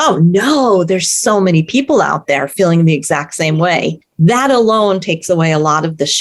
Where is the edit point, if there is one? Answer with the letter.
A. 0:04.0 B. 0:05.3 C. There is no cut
A